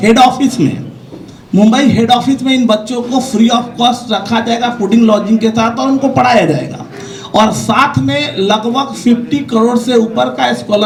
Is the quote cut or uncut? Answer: uncut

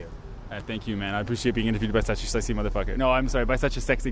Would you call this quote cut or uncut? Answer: uncut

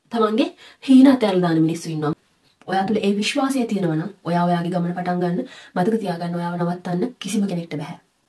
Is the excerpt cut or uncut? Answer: cut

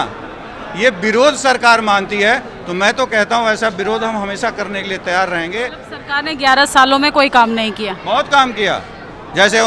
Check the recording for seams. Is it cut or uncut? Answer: cut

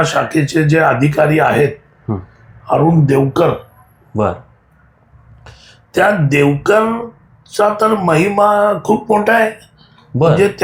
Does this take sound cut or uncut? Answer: uncut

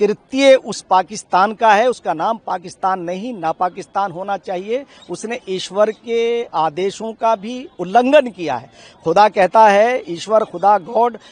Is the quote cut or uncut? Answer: uncut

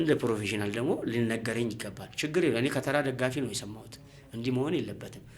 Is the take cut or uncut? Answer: uncut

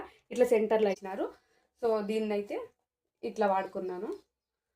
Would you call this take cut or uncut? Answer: cut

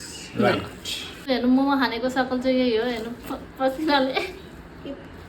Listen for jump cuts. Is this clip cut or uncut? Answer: cut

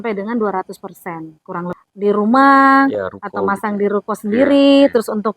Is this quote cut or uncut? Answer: cut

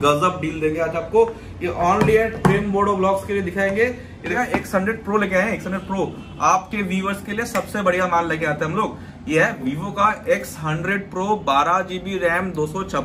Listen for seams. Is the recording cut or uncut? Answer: cut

